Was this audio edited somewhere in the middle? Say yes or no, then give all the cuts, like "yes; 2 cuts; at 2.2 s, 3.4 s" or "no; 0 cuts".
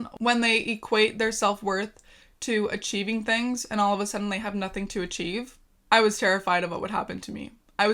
no; 0 cuts